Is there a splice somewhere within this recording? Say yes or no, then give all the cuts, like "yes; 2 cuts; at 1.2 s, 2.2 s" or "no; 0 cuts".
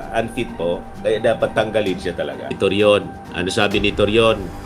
yes; 1 cut; at 2.4 s